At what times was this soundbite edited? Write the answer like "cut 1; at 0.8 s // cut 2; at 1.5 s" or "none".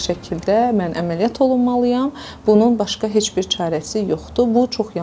none